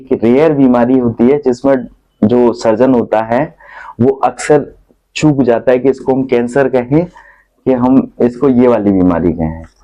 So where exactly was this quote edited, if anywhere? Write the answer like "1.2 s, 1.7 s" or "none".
none

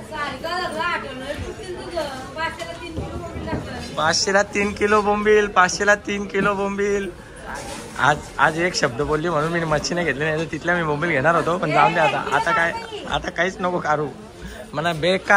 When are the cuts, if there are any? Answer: none

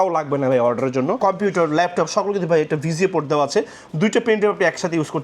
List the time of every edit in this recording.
1.2 s

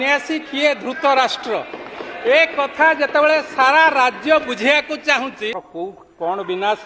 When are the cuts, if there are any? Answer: 5.6 s

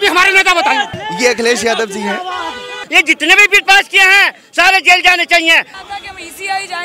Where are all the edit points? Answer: 1.0 s, 2.8 s, 5.7 s

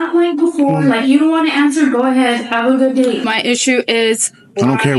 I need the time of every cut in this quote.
3.3 s

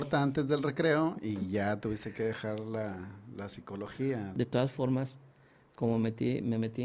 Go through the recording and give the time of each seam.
4.3 s

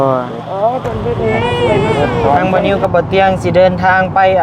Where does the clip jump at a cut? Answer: 2.4 s

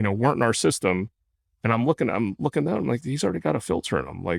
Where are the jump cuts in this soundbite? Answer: none

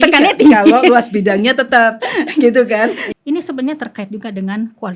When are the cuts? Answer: 3.0 s

